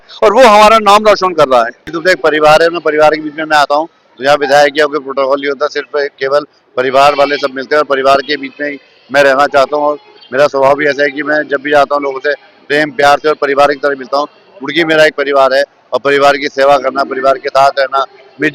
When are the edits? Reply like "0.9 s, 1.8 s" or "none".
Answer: 1.8 s